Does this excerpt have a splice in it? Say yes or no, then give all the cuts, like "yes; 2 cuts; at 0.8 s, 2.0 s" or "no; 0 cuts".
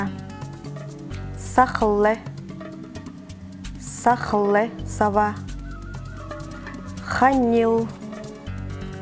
yes; 5 cuts; at 2.2 s, 3.9 s, 5.5 s, 7.1 s, 8.2 s